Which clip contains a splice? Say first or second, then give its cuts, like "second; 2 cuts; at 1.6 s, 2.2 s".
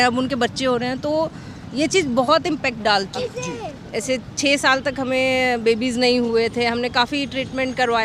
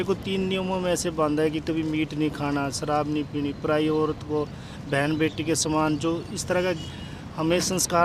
first; 1 cut; at 3.2 s